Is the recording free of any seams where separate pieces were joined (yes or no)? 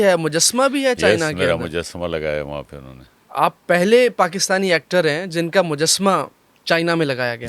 yes